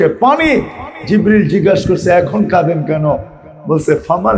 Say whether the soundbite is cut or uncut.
uncut